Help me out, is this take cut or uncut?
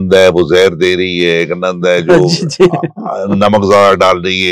uncut